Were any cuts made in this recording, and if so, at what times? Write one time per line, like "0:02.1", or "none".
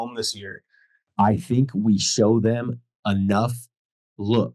0:01.1